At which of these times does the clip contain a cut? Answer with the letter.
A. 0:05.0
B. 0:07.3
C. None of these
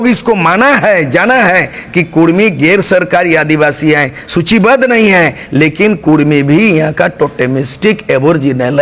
C